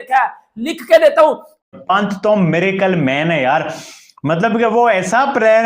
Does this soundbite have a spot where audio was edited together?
yes; 1 cut; at 1.6 s

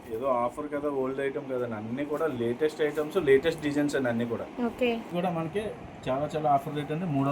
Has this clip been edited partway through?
yes; 1 cut; at 5.1 s

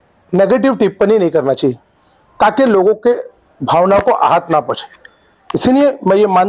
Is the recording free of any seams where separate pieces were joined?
yes; 0 cuts

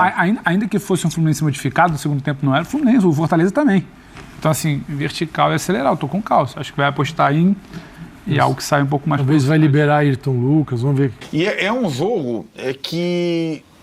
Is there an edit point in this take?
yes; 1 cut; at 11.2 s

